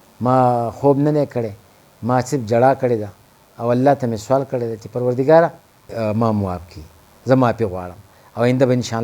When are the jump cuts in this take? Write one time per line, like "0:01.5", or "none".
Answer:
0:05.9